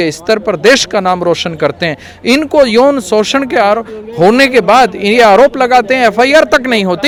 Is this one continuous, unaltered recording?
yes; 0 cuts

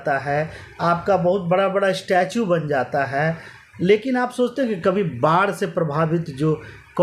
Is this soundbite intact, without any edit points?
yes; 0 cuts

